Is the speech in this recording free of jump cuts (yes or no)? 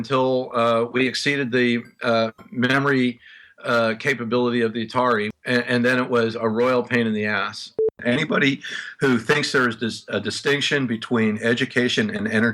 no